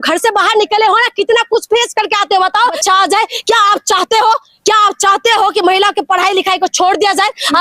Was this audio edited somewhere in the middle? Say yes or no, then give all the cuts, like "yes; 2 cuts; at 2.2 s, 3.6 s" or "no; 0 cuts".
yes; 1 cut; at 2.8 s